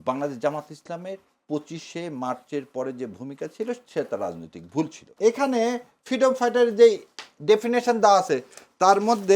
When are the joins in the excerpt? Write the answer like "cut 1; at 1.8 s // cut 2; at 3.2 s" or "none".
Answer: cut 1; at 5.0 s